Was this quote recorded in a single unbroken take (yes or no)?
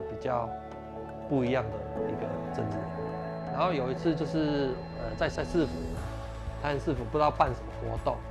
yes